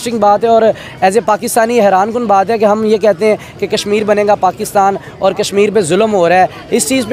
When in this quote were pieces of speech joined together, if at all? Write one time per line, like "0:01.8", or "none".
none